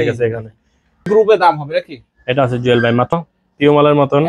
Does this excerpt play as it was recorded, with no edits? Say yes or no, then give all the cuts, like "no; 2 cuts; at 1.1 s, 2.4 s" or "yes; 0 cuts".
no; 2 cuts; at 1.1 s, 3.2 s